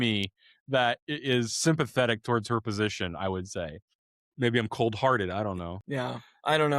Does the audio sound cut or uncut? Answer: cut